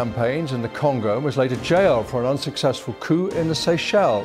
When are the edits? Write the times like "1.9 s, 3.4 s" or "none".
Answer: none